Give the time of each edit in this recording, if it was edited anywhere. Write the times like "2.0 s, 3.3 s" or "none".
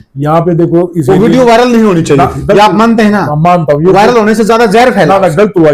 none